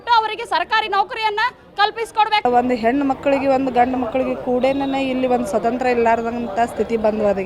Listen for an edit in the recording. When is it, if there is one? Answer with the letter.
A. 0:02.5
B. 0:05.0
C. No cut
A